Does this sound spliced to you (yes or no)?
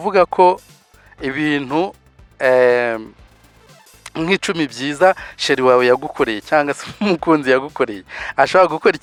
no